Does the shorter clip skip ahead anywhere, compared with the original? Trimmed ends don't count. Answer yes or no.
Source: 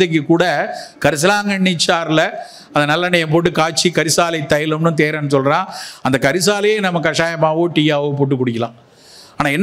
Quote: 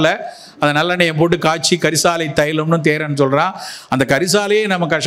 no